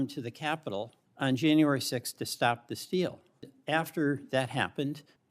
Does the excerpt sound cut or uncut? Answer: cut